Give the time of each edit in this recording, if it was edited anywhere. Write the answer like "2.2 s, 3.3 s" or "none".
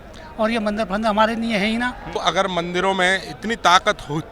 2.2 s